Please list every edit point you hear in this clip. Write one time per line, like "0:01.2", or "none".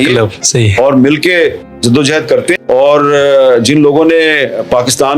0:02.6